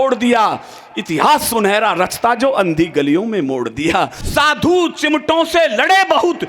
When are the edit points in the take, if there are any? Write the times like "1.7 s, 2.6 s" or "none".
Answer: 4.2 s